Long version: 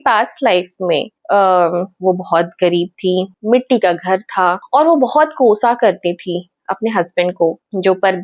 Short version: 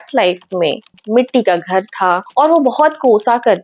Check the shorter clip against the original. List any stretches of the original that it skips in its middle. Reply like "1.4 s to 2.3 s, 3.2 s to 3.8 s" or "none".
1.2 s to 3.3 s